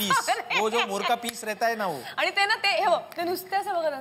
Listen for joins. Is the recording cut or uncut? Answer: uncut